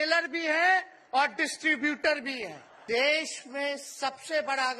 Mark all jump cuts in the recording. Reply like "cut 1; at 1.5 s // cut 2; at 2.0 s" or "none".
cut 1; at 2.7 s

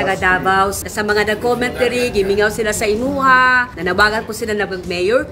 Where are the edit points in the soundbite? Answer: cut 1; at 0.8 s // cut 2; at 3.7 s

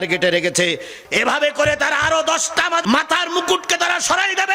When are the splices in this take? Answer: cut 1; at 2.8 s

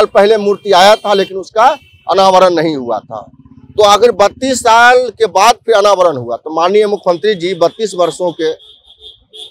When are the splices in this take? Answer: none

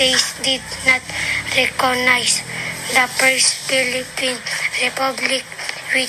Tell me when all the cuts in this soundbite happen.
none

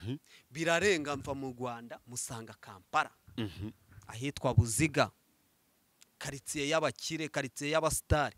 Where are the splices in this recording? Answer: none

